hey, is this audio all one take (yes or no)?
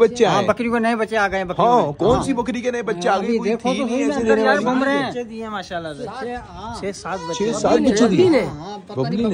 yes